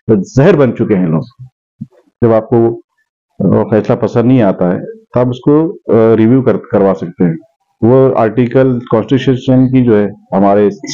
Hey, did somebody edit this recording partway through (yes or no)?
yes